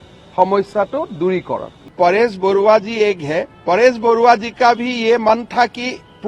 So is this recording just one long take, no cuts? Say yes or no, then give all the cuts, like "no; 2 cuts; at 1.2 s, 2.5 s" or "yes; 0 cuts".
no; 1 cut; at 1.8 s